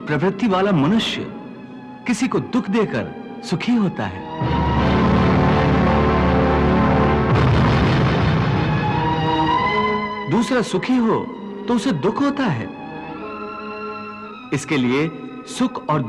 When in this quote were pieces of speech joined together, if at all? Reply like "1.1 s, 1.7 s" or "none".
none